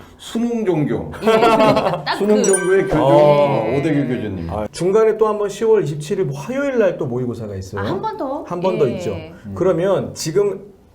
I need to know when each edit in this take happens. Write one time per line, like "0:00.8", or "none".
0:04.6